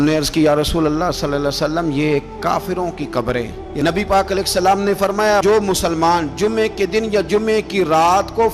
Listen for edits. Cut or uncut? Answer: cut